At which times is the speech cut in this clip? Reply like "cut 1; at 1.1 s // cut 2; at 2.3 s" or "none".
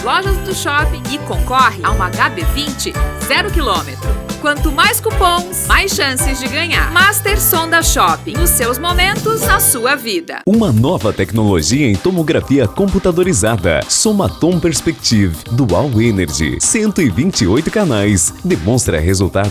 cut 1; at 10.3 s